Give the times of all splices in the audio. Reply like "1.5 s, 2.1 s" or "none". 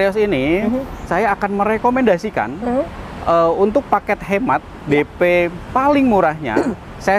1.1 s